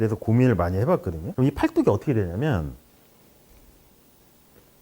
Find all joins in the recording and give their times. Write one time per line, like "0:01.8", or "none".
0:01.2